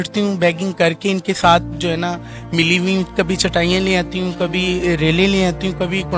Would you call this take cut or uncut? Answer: uncut